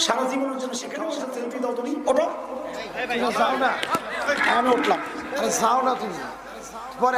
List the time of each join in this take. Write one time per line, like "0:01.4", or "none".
0:01.2